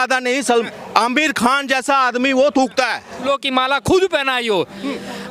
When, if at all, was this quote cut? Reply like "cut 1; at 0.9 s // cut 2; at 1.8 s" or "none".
cut 1; at 3.3 s